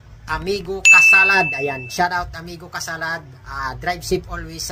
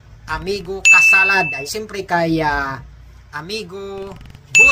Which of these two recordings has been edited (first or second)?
second